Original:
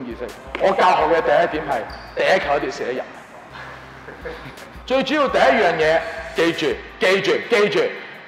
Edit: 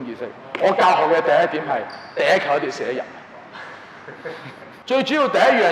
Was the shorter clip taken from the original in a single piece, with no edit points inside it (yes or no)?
yes